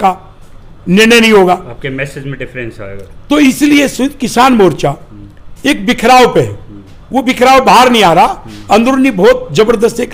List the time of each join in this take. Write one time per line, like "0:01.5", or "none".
none